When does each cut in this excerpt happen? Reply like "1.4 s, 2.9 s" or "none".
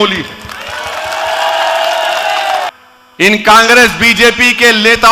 2.8 s